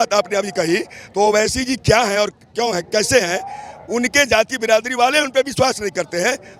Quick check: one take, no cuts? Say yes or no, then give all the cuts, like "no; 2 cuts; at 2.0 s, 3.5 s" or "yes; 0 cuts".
yes; 0 cuts